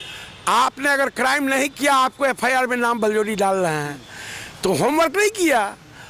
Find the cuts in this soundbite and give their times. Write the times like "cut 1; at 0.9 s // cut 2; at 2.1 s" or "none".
none